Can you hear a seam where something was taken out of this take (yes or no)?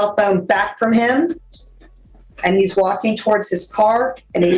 no